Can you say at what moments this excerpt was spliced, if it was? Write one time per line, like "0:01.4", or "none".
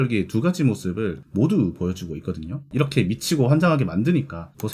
0:02.6